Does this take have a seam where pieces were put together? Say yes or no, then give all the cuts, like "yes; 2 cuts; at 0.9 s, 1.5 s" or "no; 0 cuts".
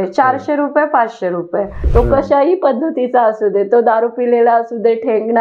yes; 1 cut; at 1.8 s